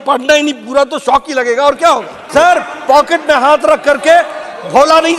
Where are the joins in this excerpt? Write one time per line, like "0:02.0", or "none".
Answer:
0:02.2